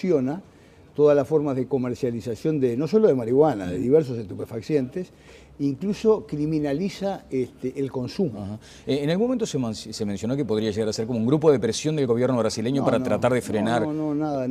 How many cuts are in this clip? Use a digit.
1